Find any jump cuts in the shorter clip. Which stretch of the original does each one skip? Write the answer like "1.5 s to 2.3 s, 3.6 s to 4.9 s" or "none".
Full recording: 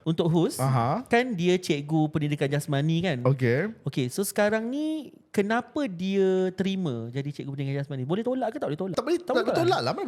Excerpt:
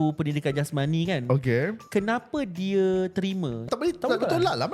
3.8 s to 5.2 s, 7.1 s to 8.9 s